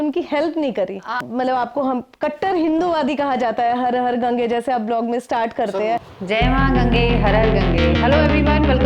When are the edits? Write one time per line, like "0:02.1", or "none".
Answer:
0:01.2
0:06.1